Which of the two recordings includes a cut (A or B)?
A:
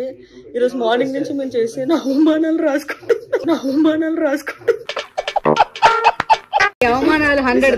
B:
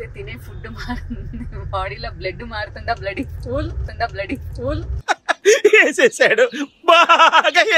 A